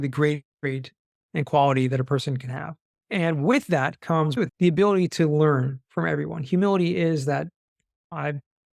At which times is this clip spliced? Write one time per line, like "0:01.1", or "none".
0:04.3